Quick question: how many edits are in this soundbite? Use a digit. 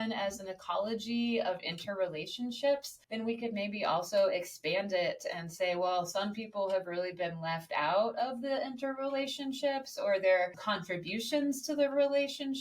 1